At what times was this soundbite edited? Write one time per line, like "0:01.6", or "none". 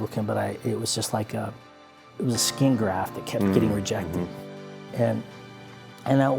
0:02.1